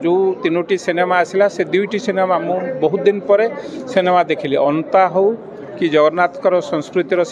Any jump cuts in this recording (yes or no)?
no